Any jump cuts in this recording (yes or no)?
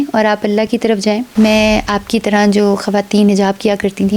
yes